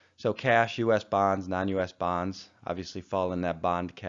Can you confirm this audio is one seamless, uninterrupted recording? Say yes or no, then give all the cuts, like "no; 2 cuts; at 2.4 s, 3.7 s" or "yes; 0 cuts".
yes; 0 cuts